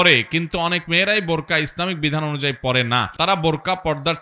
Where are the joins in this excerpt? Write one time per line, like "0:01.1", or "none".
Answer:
0:03.1